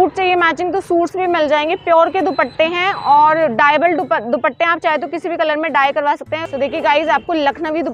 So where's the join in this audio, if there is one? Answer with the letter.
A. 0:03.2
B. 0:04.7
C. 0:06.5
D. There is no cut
C